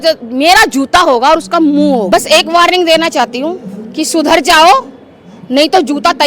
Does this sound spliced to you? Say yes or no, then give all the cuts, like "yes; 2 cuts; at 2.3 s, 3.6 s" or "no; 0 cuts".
yes; 1 cut; at 2.1 s